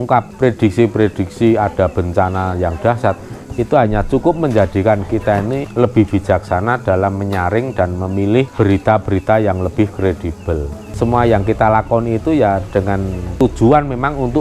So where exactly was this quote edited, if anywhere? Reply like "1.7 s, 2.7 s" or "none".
10.8 s